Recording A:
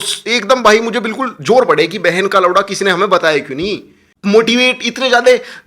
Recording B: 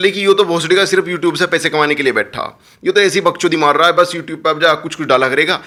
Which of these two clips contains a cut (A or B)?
A